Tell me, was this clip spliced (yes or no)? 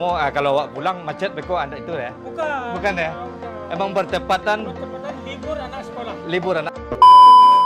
yes